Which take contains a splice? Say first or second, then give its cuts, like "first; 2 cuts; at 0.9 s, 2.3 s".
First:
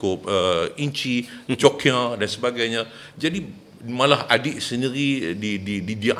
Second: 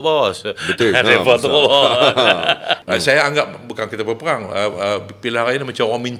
second; 1 cut; at 2.8 s